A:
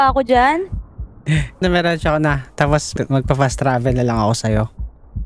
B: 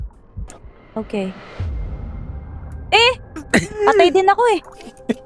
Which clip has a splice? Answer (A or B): A